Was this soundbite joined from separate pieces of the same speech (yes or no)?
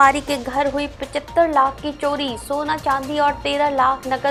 no